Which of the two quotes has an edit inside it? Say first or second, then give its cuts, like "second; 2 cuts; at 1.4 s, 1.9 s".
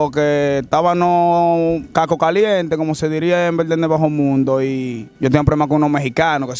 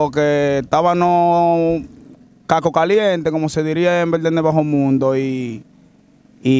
first; 2 cuts; at 1.8 s, 5.0 s